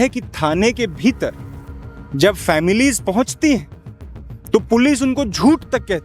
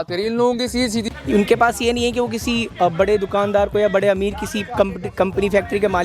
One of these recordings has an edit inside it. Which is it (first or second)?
second